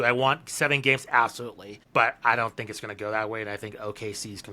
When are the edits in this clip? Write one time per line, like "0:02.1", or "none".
0:01.8